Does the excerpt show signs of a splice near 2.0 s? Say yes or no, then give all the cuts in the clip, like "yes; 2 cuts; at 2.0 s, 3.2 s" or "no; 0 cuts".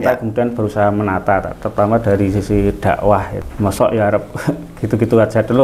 no; 1 cut; at 3.4 s